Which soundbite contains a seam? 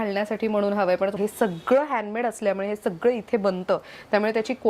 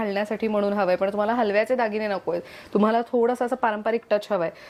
first; 1 cut; at 1.1 s

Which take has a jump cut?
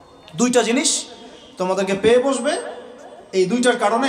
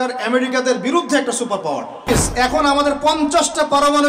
second; 1 cut; at 2.1 s

